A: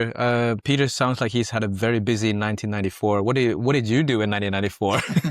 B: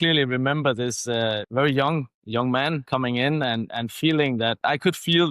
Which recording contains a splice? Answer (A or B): B